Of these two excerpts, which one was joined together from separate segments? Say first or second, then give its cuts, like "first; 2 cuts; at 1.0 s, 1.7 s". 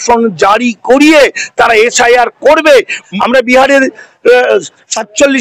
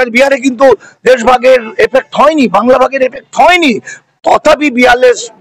first; 1 cut; at 3.0 s